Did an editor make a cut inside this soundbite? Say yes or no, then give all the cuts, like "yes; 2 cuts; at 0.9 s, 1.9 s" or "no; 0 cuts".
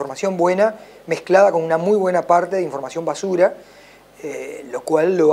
no; 0 cuts